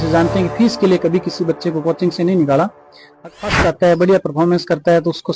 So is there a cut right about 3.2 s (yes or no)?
yes